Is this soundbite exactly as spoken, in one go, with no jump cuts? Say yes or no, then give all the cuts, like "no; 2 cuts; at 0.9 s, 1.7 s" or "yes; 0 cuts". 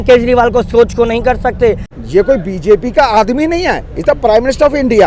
no; 1 cut; at 1.9 s